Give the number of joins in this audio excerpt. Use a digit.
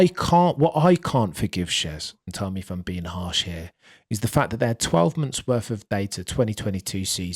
0